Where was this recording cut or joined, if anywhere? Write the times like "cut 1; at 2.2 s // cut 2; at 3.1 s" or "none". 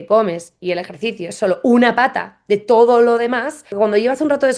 cut 1; at 3.7 s